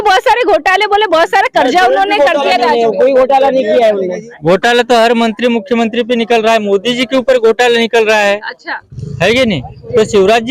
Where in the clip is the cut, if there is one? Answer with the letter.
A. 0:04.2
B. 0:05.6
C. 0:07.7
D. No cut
A